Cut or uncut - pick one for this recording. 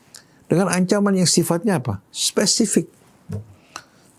uncut